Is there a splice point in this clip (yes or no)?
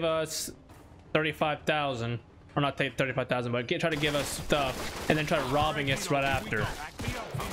no